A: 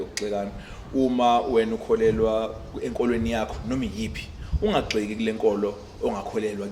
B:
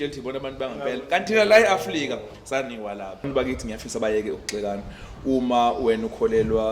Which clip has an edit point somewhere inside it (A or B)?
B